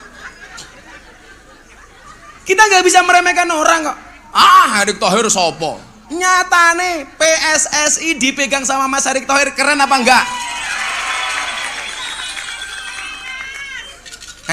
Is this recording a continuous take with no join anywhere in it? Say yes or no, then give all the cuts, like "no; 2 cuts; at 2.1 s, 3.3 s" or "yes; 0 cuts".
no; 1 cut; at 2.0 s